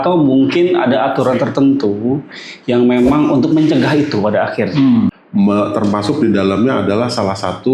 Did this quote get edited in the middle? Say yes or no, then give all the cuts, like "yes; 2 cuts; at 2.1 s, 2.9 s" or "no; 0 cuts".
yes; 1 cut; at 5.2 s